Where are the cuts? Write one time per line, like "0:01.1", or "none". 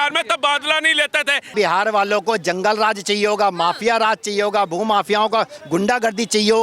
0:01.5